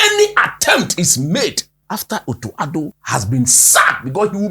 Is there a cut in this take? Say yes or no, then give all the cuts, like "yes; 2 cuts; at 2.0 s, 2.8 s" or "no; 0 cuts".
yes; 2 cuts; at 1.7 s, 3.0 s